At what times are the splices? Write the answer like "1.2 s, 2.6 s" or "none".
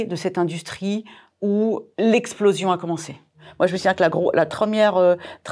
1.9 s, 3.4 s, 4.5 s

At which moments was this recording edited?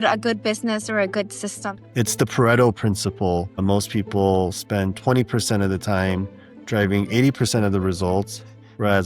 1.8 s

